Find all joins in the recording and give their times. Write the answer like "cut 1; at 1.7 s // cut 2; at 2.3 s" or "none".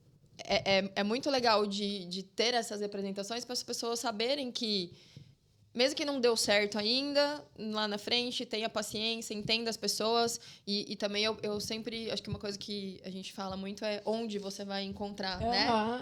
none